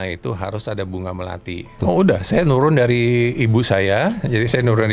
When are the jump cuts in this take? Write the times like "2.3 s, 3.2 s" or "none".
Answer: 1.8 s